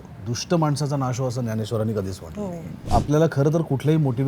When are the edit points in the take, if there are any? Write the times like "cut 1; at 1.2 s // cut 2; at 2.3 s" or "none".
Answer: cut 1; at 2.8 s